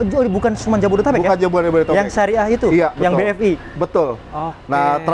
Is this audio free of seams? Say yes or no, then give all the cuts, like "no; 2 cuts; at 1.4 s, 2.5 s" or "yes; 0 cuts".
yes; 0 cuts